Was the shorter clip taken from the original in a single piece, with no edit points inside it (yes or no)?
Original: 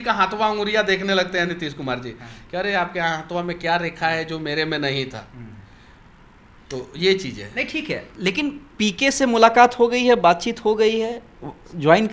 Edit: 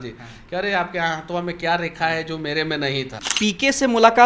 no